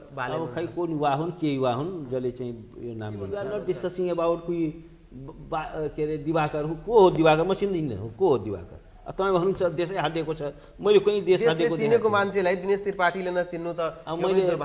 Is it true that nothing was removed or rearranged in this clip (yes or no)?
no